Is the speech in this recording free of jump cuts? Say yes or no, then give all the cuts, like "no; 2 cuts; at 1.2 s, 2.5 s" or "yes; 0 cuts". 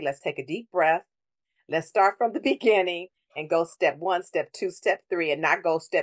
yes; 0 cuts